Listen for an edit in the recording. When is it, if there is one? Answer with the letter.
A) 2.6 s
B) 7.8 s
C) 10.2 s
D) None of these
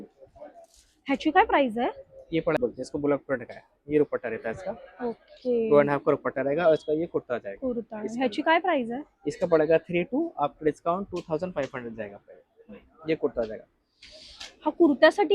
A